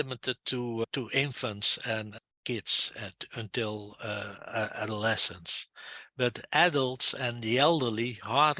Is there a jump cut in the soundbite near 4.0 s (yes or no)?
no